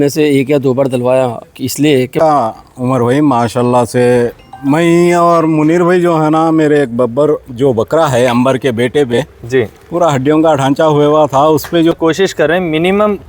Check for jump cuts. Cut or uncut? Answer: cut